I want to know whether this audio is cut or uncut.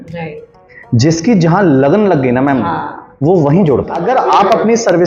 cut